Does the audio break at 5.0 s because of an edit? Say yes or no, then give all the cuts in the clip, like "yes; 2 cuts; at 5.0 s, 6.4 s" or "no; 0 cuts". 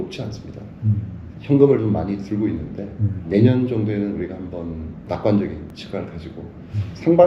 yes; 3 cuts; at 3.2 s, 5.0 s, 5.8 s